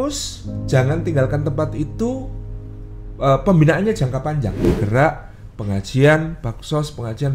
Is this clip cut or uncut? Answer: cut